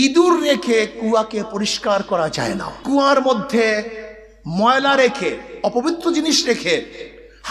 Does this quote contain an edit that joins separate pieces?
yes; 1 cut; at 2.7 s

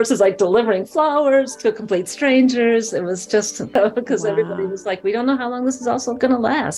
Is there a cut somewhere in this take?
yes; 1 cut; at 3.7 s

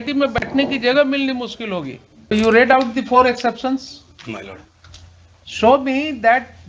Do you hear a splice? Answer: yes; 1 cut; at 2.3 s

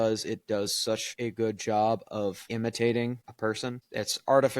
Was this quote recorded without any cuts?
no; 3 cuts; at 1.1 s, 2.4 s, 3.8 s

